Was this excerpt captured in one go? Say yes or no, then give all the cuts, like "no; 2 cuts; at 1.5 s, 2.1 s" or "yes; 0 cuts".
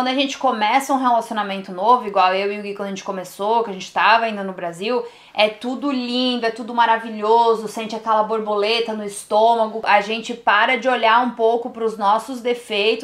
yes; 0 cuts